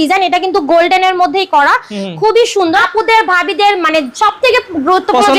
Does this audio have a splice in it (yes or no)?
yes